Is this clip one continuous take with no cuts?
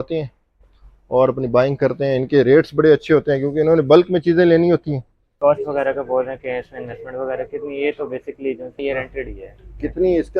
no; 2 cuts; at 5.3 s, 8.7 s

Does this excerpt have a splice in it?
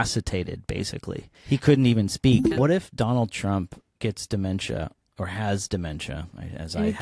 yes; 3 cuts; at 1.3 s, 2.5 s, 3.8 s

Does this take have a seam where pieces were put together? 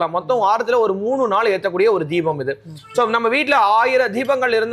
no; 0 cuts

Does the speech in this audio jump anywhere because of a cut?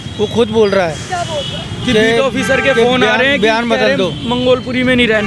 no; 0 cuts

